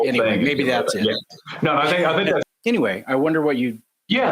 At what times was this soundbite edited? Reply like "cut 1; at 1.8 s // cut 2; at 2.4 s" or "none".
cut 1; at 2.4 s